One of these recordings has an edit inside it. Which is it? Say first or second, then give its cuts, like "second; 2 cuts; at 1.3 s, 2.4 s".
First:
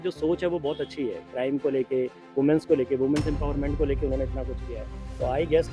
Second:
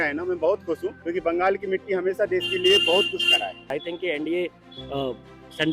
second; 2 cuts; at 1.0 s, 3.7 s